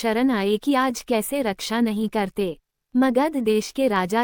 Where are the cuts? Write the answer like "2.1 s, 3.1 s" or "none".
none